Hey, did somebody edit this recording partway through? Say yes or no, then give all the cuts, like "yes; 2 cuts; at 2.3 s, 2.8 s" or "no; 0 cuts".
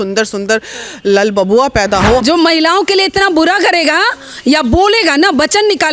yes; 1 cut; at 2.2 s